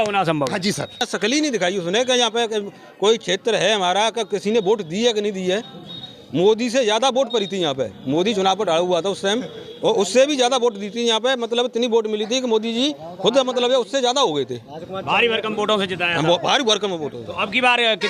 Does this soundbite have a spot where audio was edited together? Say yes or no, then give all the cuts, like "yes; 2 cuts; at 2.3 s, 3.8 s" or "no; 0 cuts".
yes; 1 cut; at 1.1 s